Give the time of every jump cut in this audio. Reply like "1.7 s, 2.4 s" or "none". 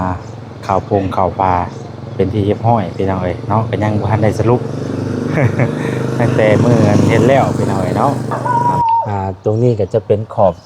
8.3 s